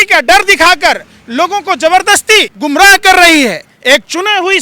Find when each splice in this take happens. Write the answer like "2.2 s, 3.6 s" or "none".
2.5 s